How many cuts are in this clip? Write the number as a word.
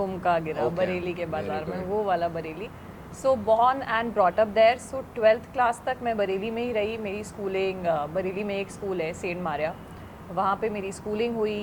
zero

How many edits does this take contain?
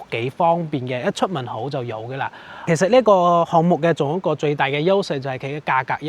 one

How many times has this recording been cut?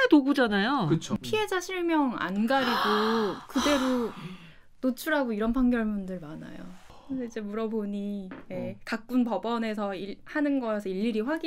two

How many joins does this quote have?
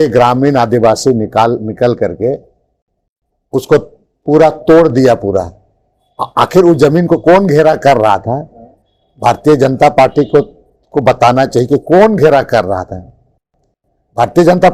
zero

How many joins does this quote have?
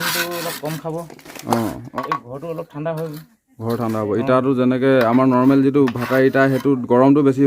one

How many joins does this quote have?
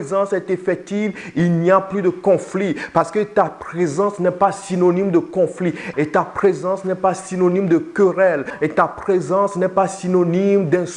two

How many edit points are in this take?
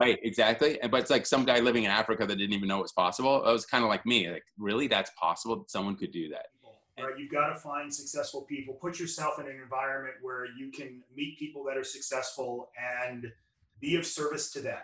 one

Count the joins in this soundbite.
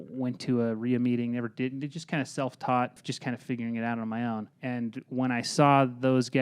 two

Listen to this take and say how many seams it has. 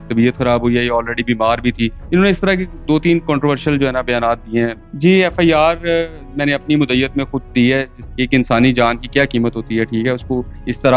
three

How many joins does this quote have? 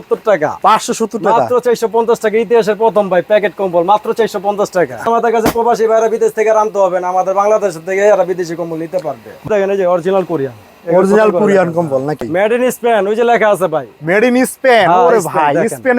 three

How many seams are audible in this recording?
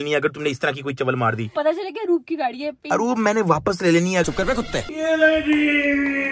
two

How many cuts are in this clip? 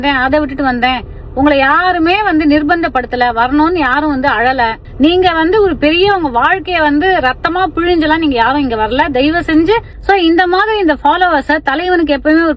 two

